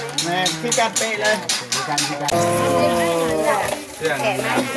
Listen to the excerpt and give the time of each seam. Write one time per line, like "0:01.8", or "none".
0:02.3